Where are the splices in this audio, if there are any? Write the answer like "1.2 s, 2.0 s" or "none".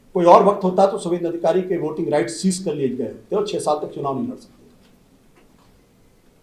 none

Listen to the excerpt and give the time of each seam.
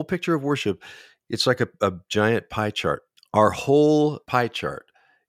3.1 s, 4.2 s

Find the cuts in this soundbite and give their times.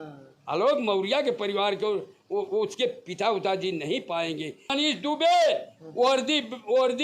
4.7 s

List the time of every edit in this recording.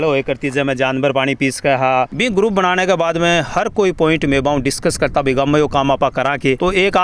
2.1 s

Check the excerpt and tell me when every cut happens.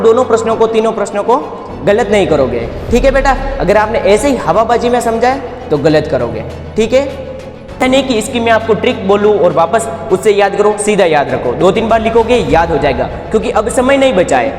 7.8 s

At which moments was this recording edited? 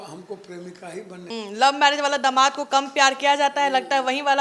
1.3 s

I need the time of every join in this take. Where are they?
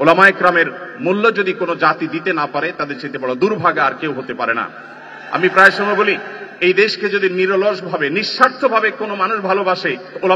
none

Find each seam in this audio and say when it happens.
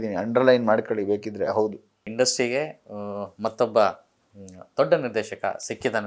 2.1 s

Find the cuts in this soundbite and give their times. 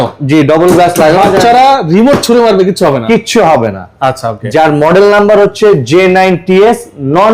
none

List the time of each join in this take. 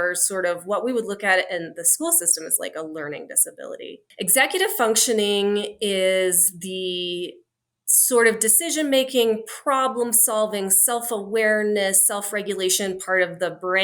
4.0 s

